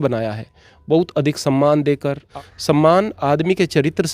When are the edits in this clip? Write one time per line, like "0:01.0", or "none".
0:02.2